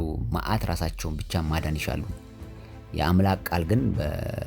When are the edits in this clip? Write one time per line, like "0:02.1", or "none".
none